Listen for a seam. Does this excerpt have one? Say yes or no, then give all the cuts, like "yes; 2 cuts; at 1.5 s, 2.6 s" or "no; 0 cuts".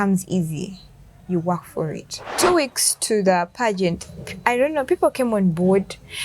yes; 1 cut; at 2.3 s